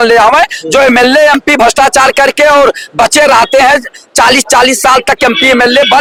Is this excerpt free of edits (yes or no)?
yes